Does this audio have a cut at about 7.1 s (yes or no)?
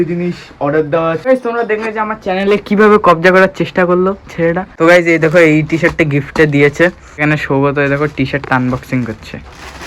yes